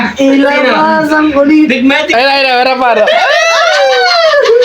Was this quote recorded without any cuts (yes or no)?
no